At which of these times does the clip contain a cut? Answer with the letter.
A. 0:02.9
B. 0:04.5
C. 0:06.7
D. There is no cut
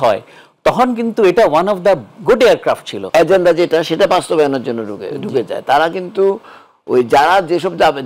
A